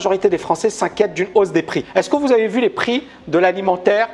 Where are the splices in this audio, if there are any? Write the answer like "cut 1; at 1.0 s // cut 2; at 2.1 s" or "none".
cut 1; at 1.8 s